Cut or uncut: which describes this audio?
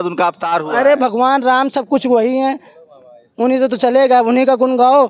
uncut